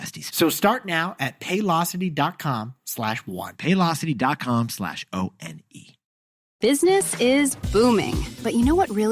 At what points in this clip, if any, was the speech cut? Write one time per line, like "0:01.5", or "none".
0:06.4